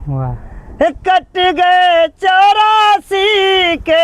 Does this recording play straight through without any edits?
yes; 0 cuts

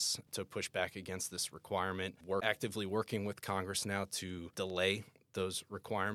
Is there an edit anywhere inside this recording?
yes; 1 cut; at 2.3 s

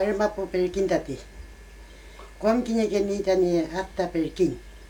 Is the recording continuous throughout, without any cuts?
yes; 0 cuts

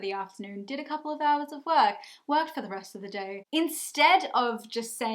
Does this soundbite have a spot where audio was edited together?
yes; 1 cut; at 3.4 s

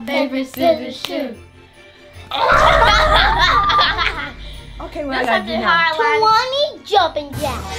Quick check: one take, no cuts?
yes; 0 cuts

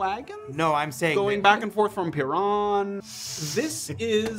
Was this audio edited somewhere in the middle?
yes; 1 cut; at 3.0 s

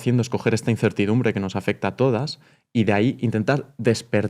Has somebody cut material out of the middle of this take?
no; 0 cuts

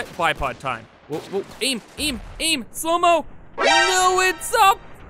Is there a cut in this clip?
yes; 1 cut; at 0.9 s

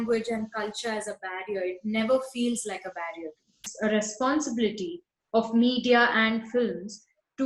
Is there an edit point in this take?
yes; 1 cut; at 3.7 s

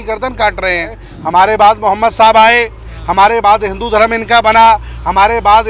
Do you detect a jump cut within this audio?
yes; 1 cut; at 1.1 s

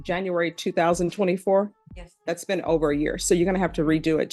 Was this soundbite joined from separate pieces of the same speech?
no; 0 cuts

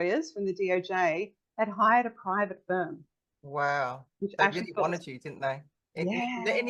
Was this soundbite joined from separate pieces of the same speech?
no; 0 cuts

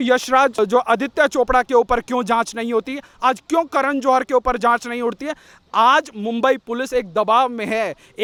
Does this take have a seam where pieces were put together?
no; 0 cuts

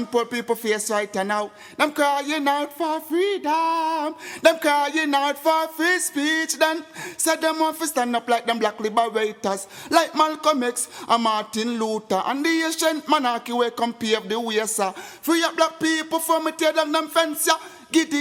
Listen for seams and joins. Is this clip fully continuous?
yes; 0 cuts

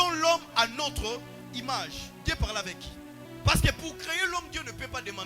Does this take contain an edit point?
yes; 1 cut; at 3.2 s

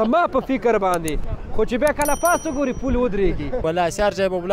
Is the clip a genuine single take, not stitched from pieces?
no; 1 cut; at 3.6 s

